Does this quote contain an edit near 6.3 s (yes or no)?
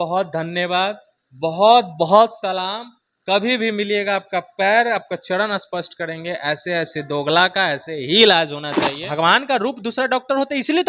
no